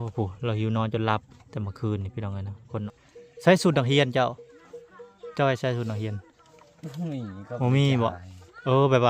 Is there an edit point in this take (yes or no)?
yes